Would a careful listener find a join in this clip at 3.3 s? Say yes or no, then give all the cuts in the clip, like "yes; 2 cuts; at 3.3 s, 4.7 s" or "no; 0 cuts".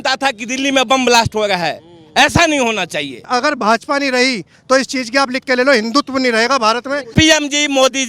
yes; 2 cuts; at 3.3 s, 7.1 s